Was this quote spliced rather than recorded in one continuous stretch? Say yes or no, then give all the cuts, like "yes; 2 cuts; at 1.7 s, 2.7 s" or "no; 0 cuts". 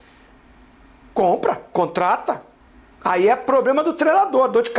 no; 0 cuts